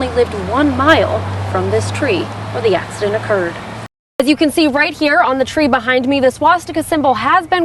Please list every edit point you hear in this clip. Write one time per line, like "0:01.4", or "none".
0:04.2